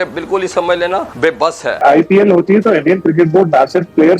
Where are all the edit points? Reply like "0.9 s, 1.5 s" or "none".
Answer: 1.8 s